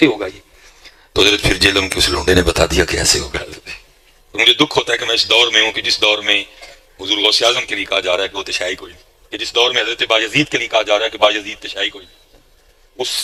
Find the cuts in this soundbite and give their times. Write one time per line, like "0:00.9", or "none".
none